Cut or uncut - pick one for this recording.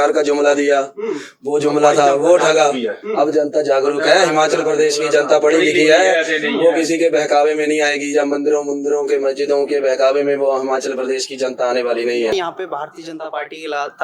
cut